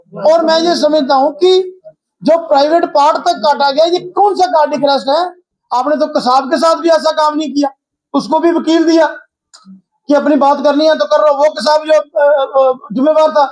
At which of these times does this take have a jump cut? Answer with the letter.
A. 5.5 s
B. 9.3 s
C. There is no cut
A